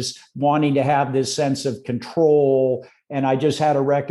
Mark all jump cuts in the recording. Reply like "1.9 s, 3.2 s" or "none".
none